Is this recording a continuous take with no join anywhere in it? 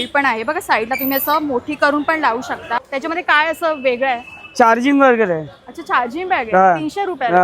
no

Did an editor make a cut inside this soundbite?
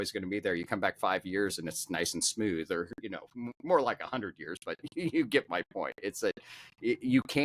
no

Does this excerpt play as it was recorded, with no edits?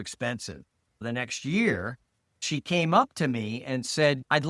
no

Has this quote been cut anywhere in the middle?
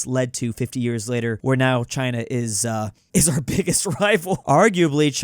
yes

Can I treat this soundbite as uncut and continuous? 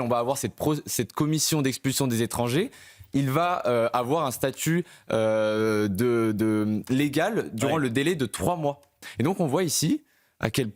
no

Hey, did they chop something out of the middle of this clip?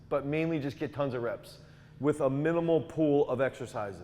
no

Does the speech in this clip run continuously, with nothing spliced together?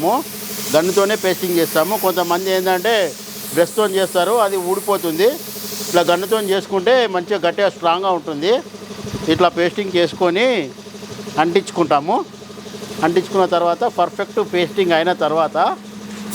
yes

